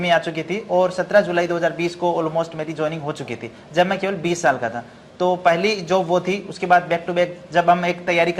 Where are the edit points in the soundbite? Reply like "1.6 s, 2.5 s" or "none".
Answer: none